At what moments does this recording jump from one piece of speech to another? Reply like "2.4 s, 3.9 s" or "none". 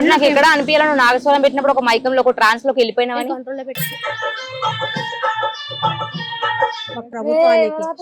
7.1 s

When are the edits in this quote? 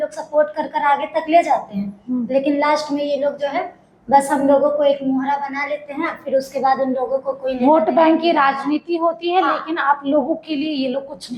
none

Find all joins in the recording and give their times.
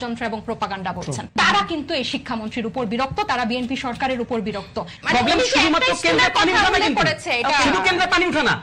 1.2 s, 4.9 s

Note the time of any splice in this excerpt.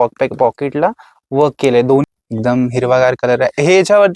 2.1 s

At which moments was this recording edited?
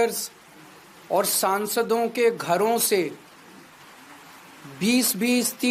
none

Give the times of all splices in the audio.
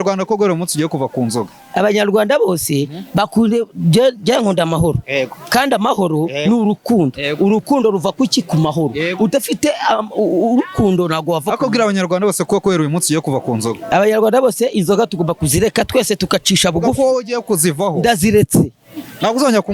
none

